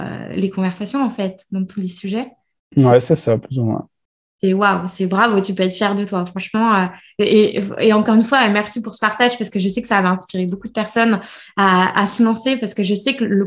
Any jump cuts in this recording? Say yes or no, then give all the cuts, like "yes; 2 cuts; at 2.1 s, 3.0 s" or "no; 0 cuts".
no; 0 cuts